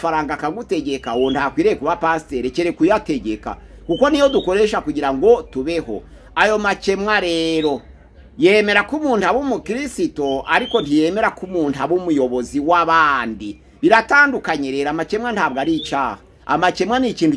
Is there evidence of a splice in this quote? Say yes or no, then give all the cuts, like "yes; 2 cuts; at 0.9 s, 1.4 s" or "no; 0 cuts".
no; 0 cuts